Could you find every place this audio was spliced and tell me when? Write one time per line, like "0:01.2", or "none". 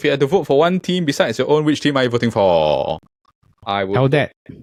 none